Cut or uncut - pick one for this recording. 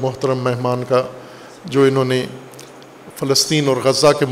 uncut